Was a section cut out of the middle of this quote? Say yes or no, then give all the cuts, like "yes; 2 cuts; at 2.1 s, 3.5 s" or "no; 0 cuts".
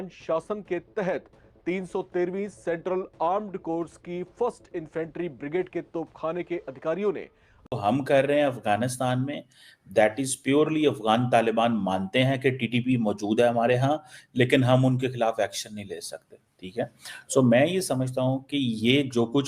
yes; 1 cut; at 7.7 s